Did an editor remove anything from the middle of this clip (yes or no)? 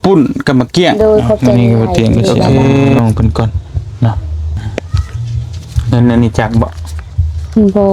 yes